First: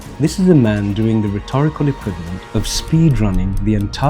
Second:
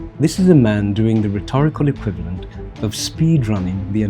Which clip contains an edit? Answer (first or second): first